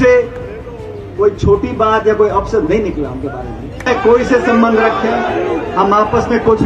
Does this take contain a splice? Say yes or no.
yes